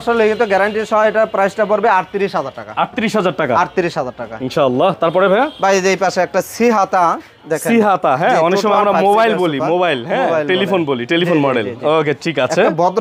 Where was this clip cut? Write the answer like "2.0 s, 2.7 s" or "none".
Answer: none